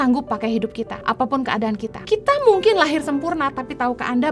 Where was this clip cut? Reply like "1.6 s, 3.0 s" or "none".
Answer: 1.0 s, 2.0 s